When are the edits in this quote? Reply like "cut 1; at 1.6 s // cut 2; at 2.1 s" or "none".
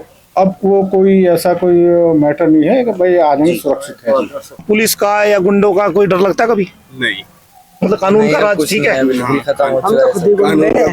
cut 1; at 4.5 s